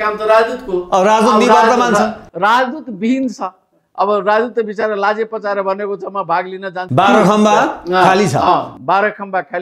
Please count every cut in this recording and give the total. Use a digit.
1